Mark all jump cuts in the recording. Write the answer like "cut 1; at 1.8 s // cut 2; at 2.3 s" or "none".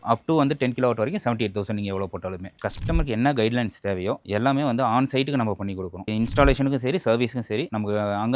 cut 1; at 2.5 s // cut 2; at 6.0 s